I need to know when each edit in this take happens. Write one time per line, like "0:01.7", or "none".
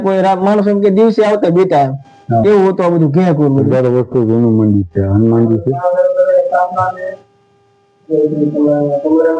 0:03.7